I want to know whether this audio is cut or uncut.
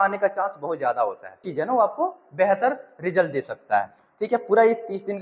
cut